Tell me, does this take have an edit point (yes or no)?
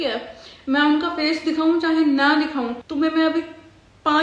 yes